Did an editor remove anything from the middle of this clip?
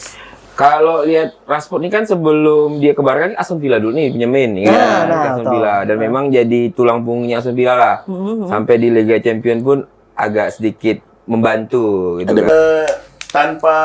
yes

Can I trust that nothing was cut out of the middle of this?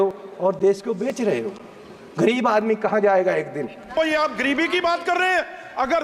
no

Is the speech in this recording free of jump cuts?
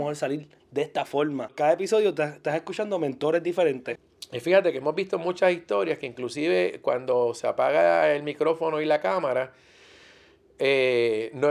no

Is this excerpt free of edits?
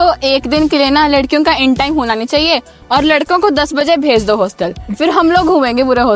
yes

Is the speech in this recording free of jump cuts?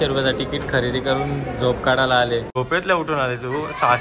no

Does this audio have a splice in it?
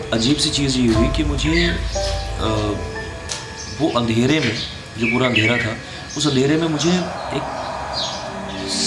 no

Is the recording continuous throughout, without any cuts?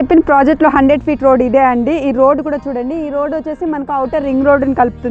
yes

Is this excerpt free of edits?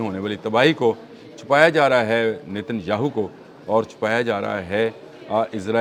yes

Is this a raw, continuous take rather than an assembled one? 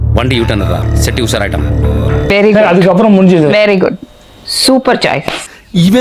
yes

